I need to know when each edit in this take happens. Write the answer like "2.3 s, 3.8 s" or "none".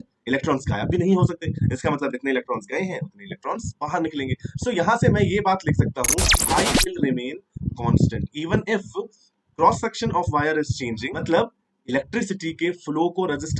11.1 s